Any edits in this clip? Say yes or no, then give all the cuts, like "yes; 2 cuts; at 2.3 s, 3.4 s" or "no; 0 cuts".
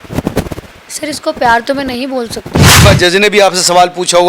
yes; 1 cut; at 2.8 s